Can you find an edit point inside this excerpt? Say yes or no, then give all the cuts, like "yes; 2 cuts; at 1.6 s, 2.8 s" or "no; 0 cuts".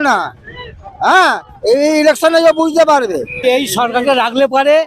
yes; 1 cut; at 3.4 s